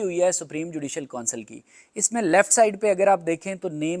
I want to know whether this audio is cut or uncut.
uncut